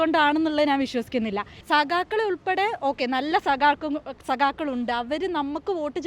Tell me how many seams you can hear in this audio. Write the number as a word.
one